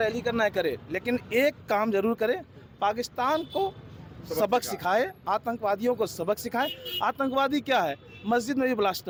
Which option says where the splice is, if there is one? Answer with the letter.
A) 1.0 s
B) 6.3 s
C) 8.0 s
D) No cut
D